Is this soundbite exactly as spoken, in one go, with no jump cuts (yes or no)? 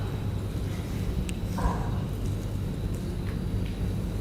yes